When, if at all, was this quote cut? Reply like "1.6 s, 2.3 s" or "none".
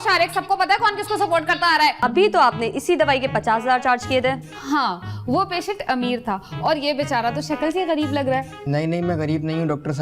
2.0 s

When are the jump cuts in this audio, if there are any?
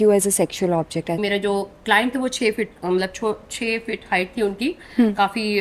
1.2 s

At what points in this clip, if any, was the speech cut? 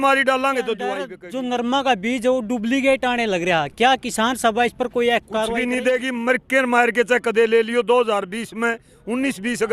1.2 s, 5.6 s

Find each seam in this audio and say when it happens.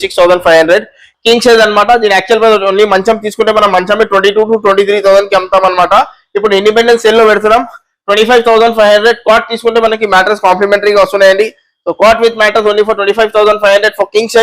1.1 s

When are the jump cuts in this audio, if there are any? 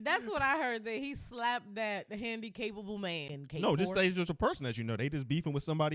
3.3 s

